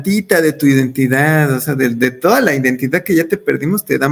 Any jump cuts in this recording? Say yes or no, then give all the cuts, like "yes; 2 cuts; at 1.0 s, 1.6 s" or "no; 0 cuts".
no; 0 cuts